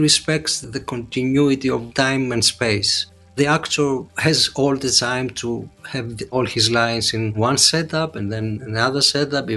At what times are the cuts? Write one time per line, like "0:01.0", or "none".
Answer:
none